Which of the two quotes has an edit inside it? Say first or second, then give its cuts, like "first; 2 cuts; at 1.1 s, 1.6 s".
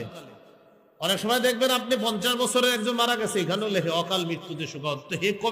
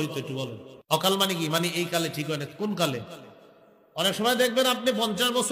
second; 1 cut; at 1.0 s